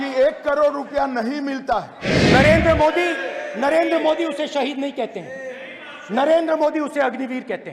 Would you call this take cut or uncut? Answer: cut